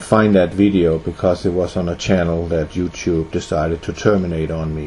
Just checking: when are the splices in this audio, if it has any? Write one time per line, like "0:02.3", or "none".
0:02.1